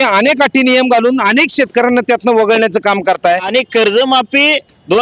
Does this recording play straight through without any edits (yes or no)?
no